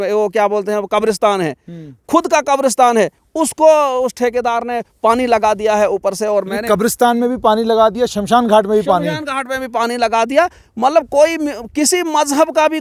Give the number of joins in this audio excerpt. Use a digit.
0